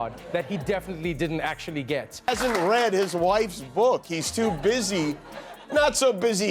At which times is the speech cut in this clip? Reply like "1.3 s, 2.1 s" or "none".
2.3 s